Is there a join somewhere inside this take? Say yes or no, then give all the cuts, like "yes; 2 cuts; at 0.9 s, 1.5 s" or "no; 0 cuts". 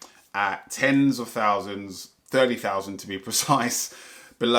no; 0 cuts